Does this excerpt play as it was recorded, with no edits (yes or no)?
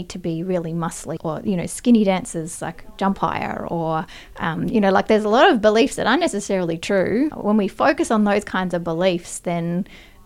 no